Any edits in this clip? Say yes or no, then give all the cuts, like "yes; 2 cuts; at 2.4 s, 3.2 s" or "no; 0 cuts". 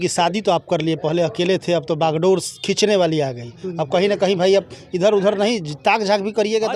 no; 0 cuts